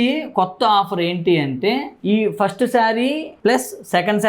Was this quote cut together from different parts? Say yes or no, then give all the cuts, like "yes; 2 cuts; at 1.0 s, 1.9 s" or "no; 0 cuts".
yes; 2 cuts; at 1.9 s, 3.3 s